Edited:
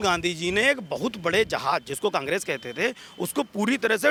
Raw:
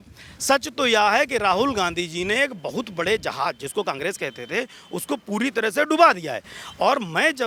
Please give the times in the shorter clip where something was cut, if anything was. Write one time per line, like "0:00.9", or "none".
none